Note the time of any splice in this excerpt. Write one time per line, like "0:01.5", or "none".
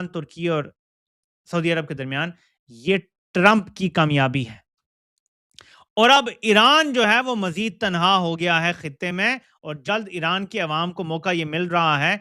none